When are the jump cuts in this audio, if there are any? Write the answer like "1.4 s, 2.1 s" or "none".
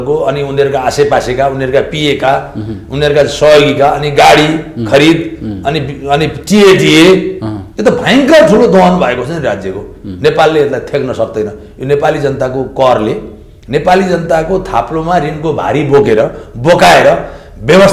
none